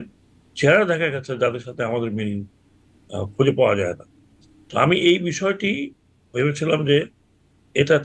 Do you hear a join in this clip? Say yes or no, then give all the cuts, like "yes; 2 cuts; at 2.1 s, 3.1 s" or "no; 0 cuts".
no; 0 cuts